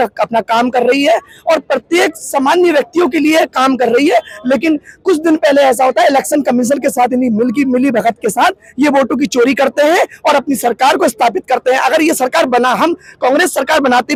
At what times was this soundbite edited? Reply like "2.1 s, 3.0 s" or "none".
none

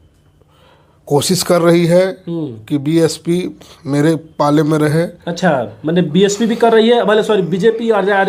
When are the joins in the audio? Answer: none

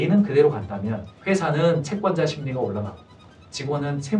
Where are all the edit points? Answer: 1.1 s

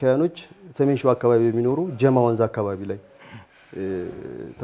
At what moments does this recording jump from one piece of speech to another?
none

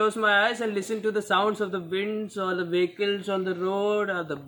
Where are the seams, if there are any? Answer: none

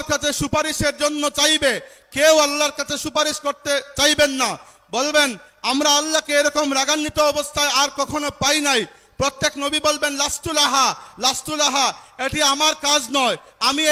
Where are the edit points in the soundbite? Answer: none

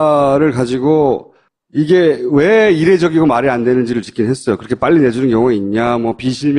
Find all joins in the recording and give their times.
5.5 s

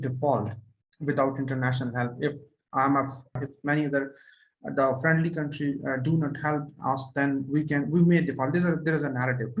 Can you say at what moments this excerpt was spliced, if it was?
3.4 s

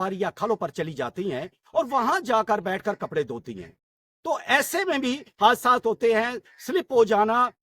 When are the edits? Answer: none

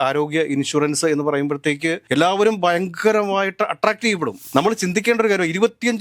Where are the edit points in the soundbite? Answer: 4.4 s

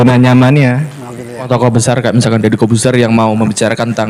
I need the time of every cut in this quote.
1.5 s

